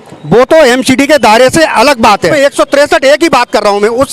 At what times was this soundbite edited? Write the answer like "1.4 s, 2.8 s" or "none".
2.3 s